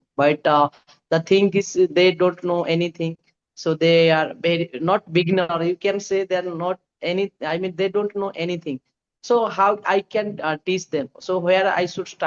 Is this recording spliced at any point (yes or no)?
no